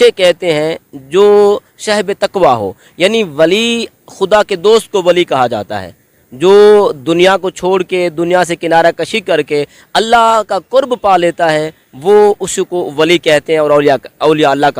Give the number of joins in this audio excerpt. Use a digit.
0